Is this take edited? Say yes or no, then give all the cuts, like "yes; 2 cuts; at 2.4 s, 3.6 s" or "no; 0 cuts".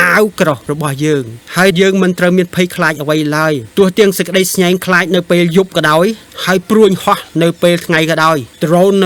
no; 0 cuts